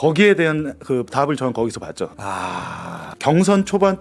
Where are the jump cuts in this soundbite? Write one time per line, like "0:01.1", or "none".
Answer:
0:02.1
0:03.1